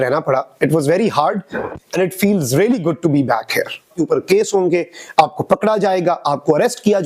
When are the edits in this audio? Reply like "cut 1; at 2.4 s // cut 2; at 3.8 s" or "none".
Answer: cut 1; at 3.9 s

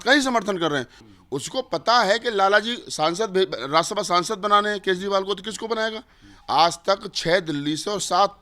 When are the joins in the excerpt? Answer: cut 1; at 1.0 s

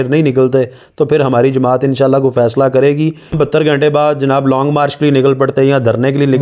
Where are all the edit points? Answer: cut 1; at 3.3 s

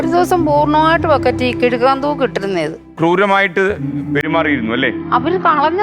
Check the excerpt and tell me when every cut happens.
cut 1; at 2.9 s

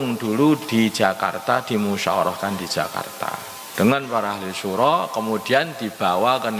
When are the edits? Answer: cut 1; at 3.6 s

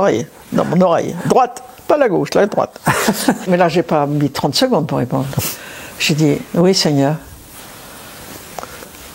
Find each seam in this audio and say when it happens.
cut 1; at 3.5 s

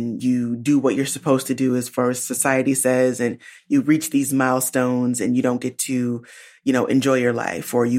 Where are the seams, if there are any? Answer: none

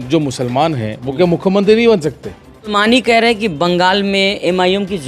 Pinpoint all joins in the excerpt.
cut 1; at 2.7 s

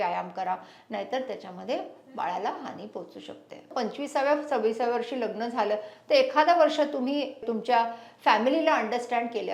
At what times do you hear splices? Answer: cut 1; at 3.7 s

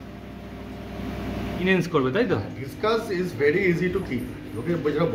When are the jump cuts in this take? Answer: cut 1; at 1.6 s

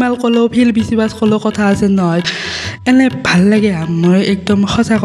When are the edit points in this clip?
cut 1; at 2.2 s

